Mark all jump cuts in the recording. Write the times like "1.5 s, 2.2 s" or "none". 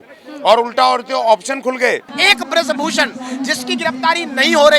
2.1 s

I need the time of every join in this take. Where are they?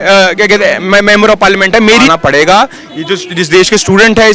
2.1 s

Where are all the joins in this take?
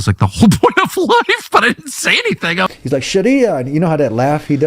2.7 s

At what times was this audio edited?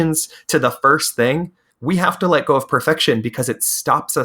1.7 s

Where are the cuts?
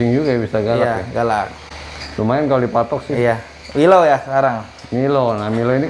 none

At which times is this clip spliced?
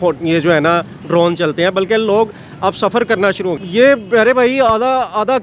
3.6 s

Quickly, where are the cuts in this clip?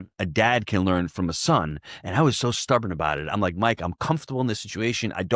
none

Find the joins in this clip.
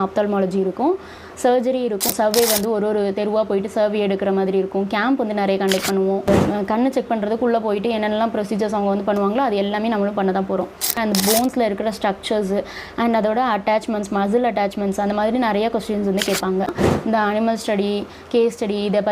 2.1 s, 6.3 s, 10.9 s, 16.9 s

